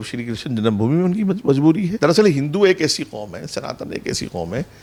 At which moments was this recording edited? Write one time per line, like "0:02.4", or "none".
none